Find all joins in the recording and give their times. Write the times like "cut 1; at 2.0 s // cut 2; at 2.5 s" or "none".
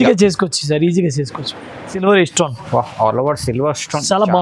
cut 1; at 1.9 s